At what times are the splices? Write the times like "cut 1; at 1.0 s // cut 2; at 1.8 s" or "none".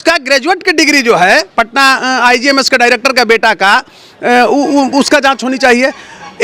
none

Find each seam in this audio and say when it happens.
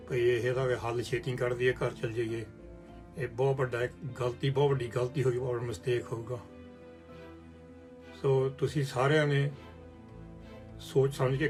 none

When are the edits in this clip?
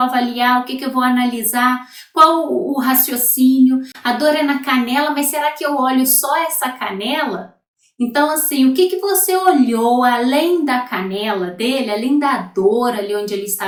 none

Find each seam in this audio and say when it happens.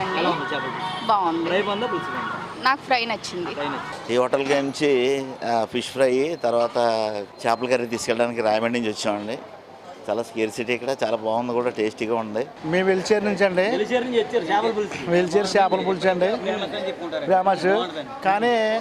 cut 1; at 3.9 s // cut 2; at 7.3 s // cut 3; at 12.6 s

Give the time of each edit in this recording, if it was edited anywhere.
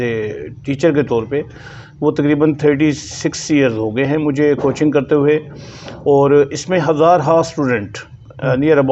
none

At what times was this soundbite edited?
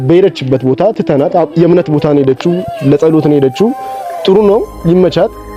none

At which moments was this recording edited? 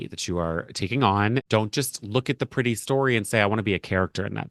cut 1; at 1.4 s

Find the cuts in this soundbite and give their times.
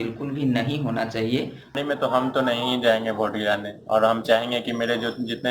cut 1; at 1.8 s

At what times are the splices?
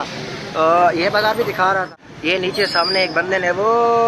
cut 1; at 1.9 s

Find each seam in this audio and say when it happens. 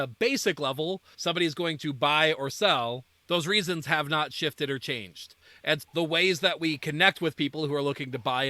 cut 1; at 1.1 s // cut 2; at 3.1 s

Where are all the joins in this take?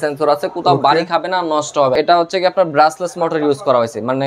cut 1; at 2.0 s

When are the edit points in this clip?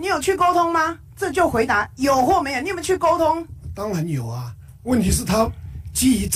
none

